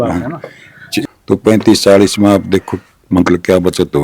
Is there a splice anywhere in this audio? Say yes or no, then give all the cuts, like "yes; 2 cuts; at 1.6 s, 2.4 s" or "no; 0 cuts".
yes; 1 cut; at 1.1 s